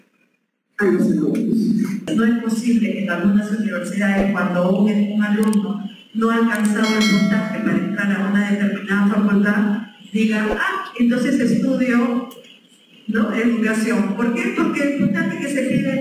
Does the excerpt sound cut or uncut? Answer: cut